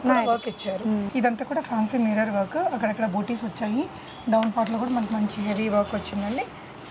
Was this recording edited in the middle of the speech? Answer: yes; 1 cut; at 1.1 s

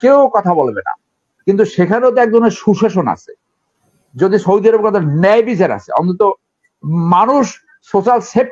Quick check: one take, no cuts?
yes; 0 cuts

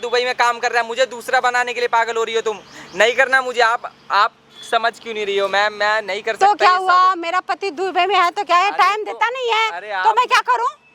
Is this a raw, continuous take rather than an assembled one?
yes; 0 cuts

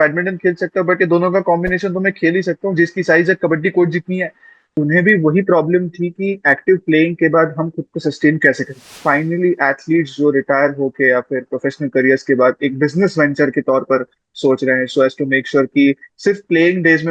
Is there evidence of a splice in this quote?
yes; 2 cuts; at 4.7 s, 9.0 s

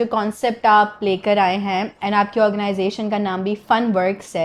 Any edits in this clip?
no; 0 cuts

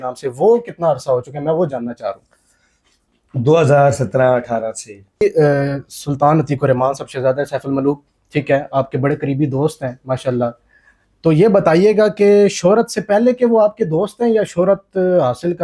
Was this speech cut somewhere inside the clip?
yes; 1 cut; at 5.2 s

